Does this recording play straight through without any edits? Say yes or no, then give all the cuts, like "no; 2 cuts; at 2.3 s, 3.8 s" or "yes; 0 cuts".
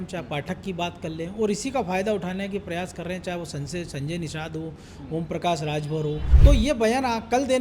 no; 1 cut; at 6.3 s